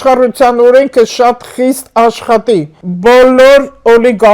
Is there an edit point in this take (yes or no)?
yes